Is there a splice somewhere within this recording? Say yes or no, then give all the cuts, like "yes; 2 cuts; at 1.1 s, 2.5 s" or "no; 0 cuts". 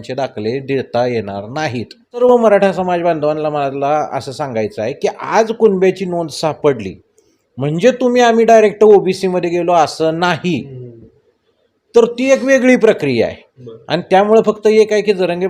yes; 1 cut; at 2.2 s